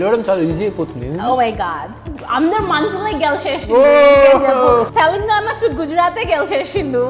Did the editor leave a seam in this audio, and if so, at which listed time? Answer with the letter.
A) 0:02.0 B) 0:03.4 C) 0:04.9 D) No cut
C